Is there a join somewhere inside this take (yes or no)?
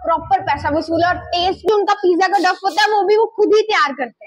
yes